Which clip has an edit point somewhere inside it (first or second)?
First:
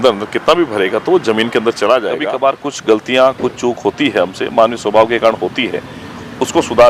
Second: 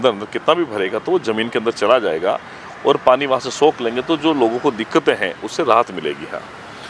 first